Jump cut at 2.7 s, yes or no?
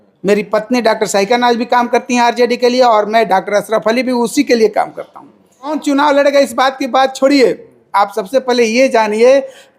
no